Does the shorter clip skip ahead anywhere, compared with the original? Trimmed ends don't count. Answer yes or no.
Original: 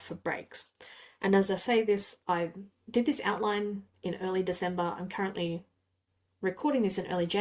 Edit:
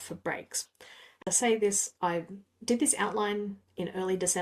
yes